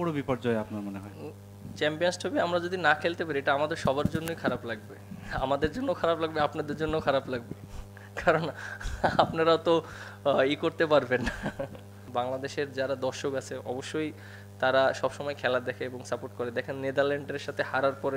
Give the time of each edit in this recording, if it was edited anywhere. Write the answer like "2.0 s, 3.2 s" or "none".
12.0 s